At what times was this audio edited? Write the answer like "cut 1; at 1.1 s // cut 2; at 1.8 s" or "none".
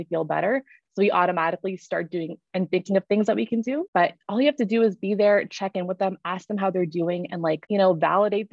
cut 1; at 3.8 s // cut 2; at 7.6 s